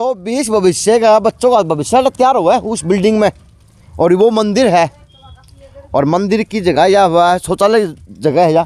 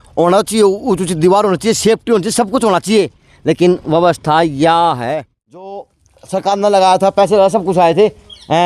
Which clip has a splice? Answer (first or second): second